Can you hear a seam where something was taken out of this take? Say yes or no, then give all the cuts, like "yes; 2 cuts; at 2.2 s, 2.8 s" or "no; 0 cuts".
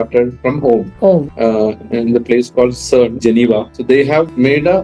no; 0 cuts